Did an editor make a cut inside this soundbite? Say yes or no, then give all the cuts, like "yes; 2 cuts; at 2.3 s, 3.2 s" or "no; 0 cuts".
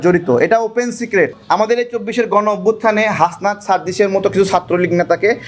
yes; 1 cut; at 1.4 s